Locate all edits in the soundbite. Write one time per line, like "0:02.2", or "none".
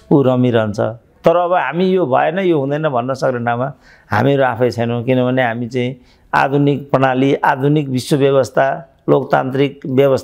none